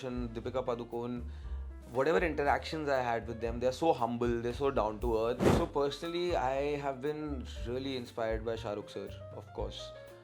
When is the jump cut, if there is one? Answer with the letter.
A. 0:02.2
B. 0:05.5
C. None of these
B